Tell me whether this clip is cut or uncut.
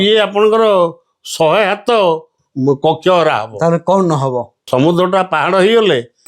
cut